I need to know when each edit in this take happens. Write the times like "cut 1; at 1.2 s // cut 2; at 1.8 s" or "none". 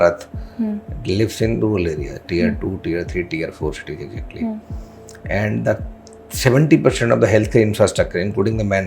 none